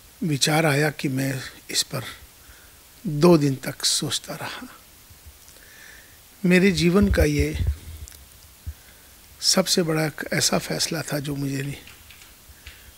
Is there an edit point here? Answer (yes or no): no